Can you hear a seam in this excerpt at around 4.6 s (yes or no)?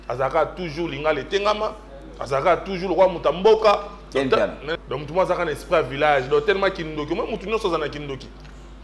yes